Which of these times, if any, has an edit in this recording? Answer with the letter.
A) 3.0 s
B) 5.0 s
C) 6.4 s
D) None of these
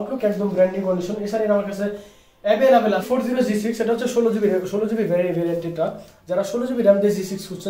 A